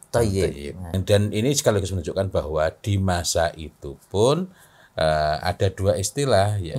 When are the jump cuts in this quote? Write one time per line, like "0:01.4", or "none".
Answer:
0:01.0